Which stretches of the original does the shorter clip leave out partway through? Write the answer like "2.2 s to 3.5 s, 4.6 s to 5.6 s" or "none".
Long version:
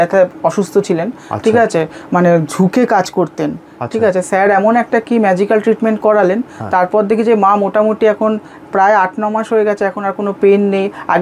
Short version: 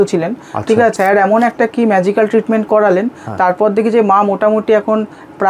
1.7 s to 4.3 s